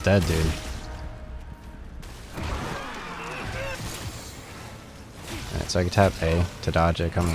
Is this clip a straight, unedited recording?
no; 1 cut; at 3.8 s

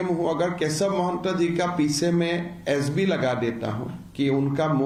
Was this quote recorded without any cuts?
yes; 0 cuts

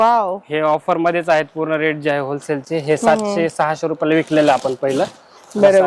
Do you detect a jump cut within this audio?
no; 0 cuts

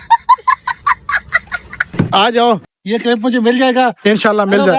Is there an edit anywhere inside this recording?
no; 0 cuts

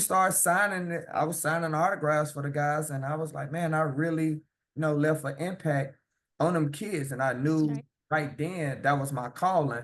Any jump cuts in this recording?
no; 0 cuts

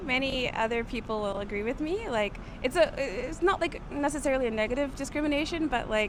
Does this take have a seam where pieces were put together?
no; 0 cuts

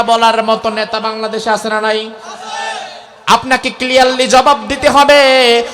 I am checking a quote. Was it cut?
no; 0 cuts

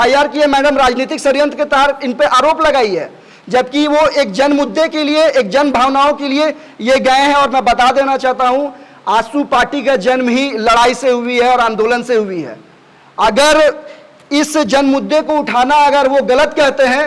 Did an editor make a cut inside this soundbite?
no; 0 cuts

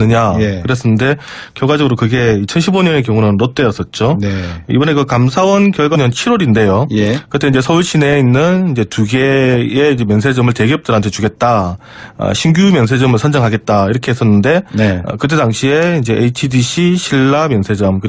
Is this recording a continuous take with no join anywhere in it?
yes; 0 cuts

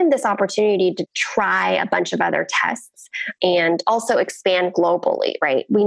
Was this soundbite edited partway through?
yes; 2 cuts; at 1.0 s, 3.3 s

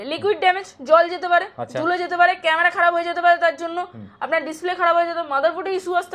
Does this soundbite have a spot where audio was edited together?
no; 0 cuts

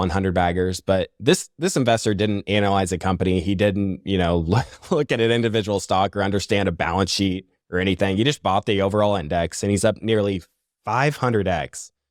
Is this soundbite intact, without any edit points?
yes; 0 cuts

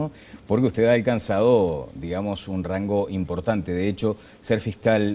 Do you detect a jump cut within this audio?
yes; 1 cut; at 2.4 s

